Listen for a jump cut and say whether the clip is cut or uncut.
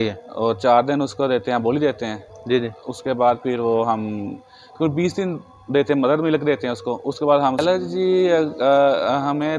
cut